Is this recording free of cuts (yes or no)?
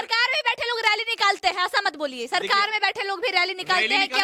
yes